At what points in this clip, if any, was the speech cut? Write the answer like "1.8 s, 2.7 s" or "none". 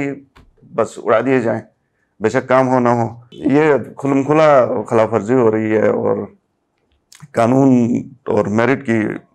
3.2 s